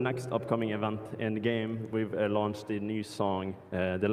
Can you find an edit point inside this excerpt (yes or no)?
no